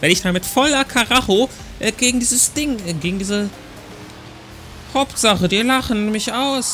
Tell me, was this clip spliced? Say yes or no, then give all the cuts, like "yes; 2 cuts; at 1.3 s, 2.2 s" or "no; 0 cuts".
no; 0 cuts